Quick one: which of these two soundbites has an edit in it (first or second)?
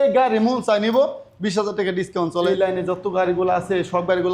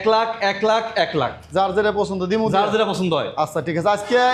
first